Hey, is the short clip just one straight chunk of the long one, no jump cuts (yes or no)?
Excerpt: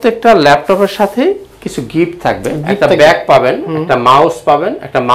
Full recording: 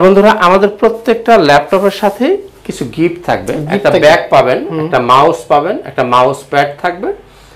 yes